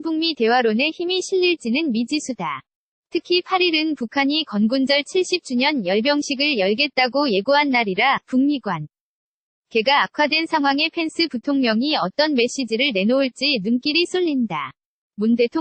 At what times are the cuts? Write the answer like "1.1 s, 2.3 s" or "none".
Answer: none